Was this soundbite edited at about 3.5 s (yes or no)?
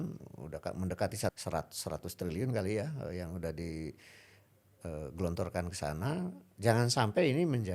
no